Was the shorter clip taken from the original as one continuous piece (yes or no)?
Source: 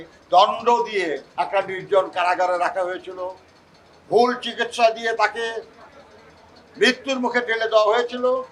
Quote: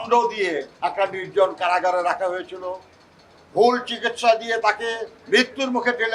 no